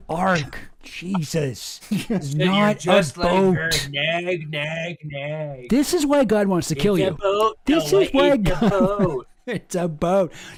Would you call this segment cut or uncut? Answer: uncut